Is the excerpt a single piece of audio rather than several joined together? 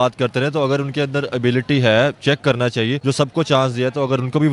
no; 1 cut; at 3.0 s

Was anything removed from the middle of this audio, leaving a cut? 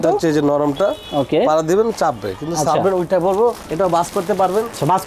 no; 0 cuts

